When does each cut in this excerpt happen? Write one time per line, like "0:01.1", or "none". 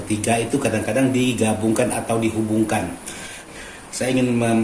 0:03.3